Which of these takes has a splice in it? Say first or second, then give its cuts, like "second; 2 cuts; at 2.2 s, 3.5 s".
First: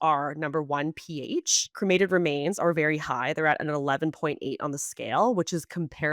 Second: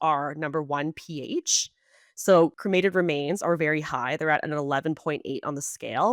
first; 1 cut; at 1.7 s